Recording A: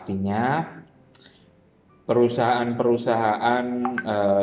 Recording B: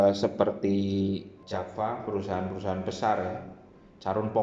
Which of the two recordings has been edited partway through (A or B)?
B